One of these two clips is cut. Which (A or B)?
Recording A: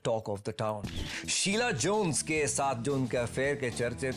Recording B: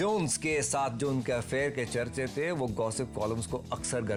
A